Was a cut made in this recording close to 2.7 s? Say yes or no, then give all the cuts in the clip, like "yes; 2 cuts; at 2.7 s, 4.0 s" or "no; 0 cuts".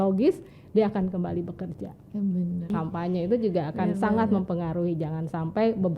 yes; 1 cut; at 2.7 s